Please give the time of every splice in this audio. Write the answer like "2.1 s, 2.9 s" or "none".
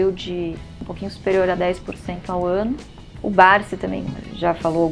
3.2 s

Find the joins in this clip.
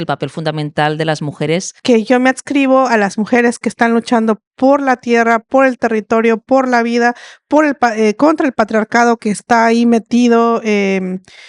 1.7 s

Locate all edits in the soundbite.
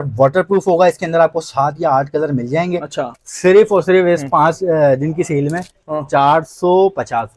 3.0 s

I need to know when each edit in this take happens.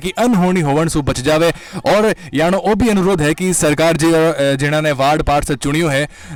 none

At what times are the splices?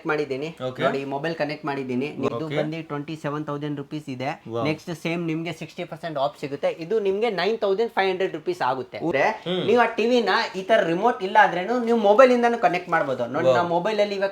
2.3 s, 9.1 s

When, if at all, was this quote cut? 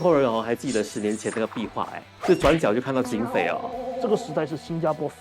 2.0 s, 4.0 s

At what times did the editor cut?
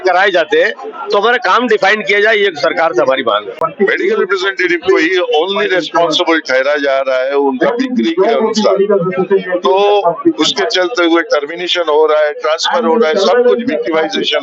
3.7 s

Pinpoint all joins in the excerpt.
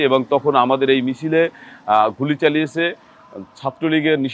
none

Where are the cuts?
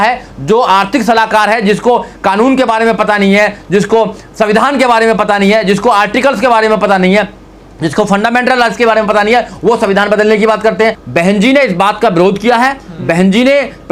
11.0 s

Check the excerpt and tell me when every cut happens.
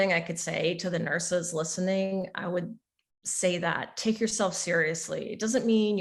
none

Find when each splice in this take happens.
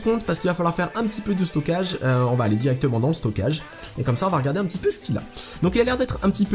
none

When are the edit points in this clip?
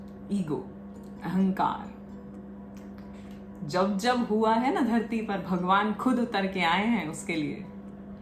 none

